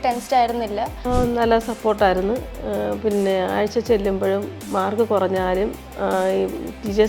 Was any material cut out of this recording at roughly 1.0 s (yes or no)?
yes